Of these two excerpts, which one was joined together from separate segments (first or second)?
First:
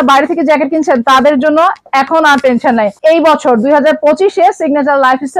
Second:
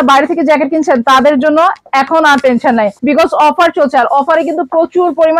second